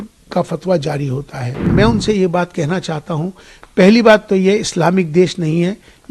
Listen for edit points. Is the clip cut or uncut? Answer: cut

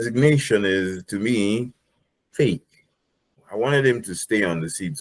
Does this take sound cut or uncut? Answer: cut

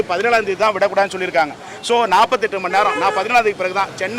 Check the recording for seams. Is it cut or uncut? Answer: uncut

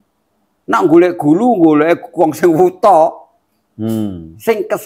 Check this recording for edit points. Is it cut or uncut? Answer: uncut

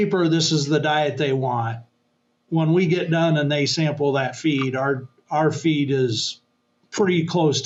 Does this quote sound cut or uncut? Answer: uncut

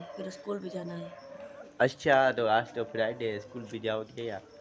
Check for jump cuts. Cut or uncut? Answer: uncut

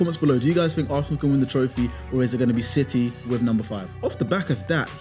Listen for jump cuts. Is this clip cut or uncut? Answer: cut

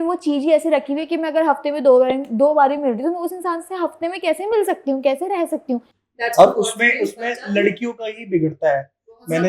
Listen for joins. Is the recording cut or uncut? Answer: cut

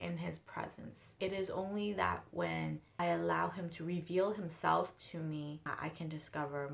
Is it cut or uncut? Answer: cut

